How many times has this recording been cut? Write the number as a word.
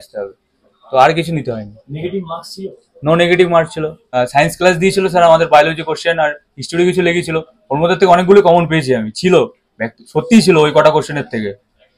one